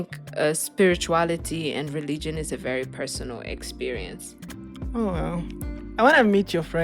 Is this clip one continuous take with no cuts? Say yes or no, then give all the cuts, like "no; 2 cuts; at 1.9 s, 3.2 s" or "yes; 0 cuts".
no; 1 cut; at 4.6 s